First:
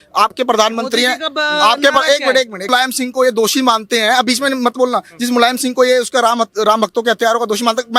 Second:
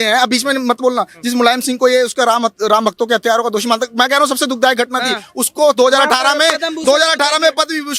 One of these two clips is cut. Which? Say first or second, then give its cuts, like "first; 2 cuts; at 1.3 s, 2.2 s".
first; 1 cut; at 2.7 s